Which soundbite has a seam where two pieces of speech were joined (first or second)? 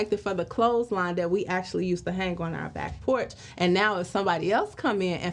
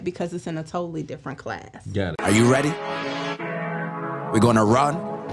second